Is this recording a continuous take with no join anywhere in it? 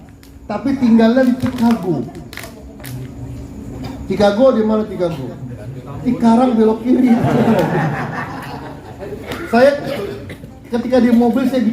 no; 1 cut; at 9.3 s

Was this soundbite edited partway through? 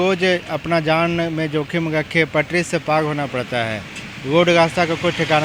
no; 0 cuts

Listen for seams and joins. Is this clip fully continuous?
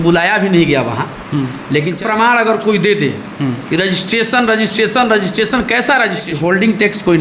no; 2 cuts; at 1.9 s, 6.3 s

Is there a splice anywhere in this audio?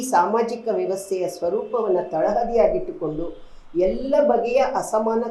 no; 0 cuts

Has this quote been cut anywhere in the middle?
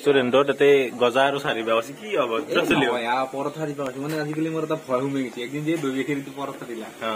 no; 0 cuts

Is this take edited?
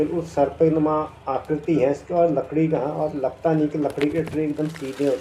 no; 0 cuts

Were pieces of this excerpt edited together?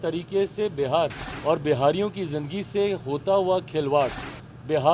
yes; 1 cut; at 1.3 s

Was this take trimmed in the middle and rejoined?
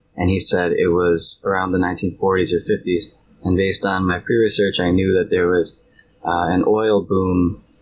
no; 0 cuts

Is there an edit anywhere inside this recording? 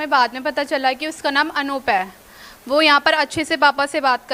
no; 0 cuts

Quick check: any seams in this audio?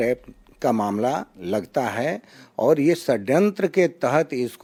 no; 0 cuts

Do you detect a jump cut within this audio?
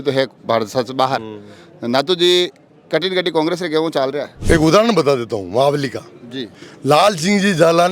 yes; 1 cut; at 4.4 s

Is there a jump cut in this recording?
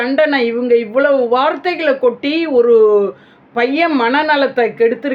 no; 0 cuts

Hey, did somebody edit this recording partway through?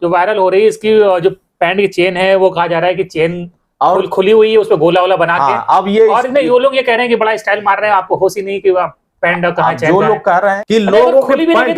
yes; 1 cut; at 10.6 s

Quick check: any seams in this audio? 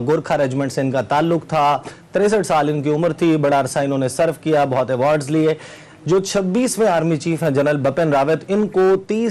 no; 0 cuts

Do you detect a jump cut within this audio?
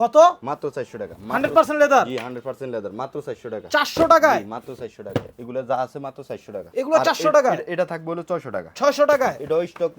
no; 0 cuts

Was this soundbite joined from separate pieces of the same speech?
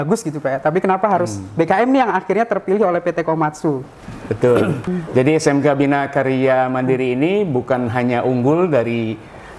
yes; 1 cut; at 5.0 s

